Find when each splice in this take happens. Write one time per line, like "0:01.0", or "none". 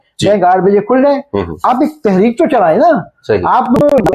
none